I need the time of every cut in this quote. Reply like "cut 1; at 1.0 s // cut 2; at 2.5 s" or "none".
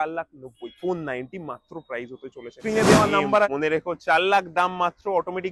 cut 1; at 3.5 s